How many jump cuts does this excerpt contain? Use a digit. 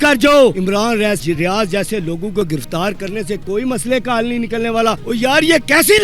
2